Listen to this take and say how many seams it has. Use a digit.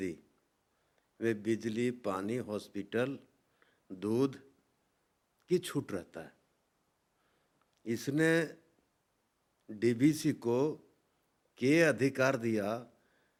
0